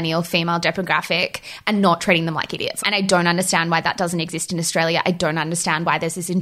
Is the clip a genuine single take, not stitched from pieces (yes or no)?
no